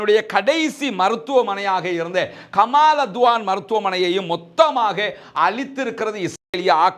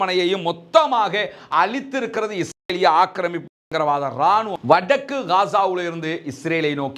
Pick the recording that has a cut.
second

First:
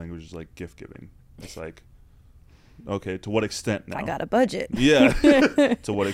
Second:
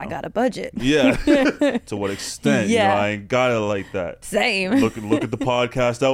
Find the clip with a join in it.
second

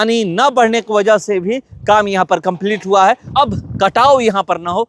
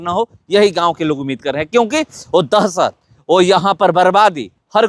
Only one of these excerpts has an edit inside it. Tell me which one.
first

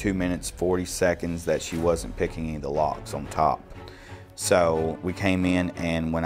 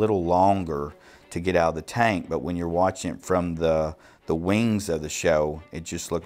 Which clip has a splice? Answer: first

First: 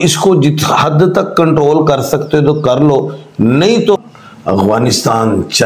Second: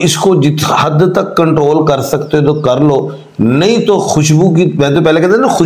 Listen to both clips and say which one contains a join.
first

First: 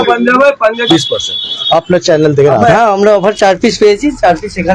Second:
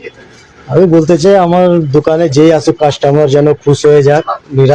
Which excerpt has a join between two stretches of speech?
first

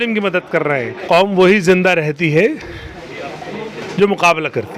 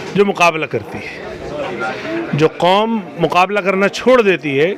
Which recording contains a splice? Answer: first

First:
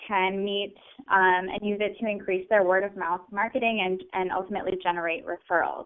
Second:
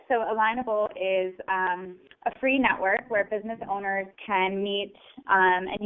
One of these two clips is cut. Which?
second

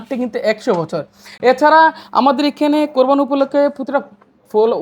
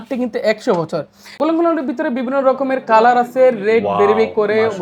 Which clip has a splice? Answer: second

